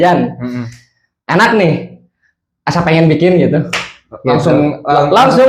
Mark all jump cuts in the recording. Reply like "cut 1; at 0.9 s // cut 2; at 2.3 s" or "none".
none

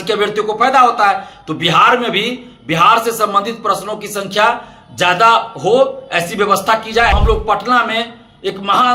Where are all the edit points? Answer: cut 1; at 7.1 s

